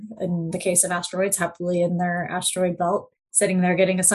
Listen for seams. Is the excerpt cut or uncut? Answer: cut